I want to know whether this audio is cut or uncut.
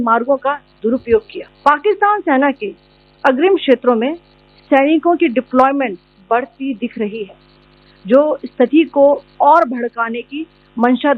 cut